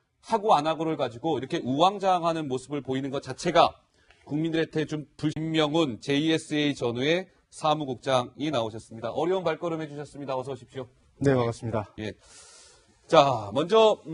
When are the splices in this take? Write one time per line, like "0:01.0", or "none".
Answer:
none